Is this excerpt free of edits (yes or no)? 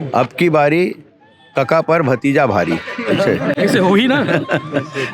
yes